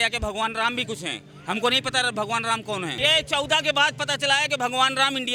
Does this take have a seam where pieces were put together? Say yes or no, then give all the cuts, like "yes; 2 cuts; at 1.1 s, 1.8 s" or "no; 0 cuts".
no; 0 cuts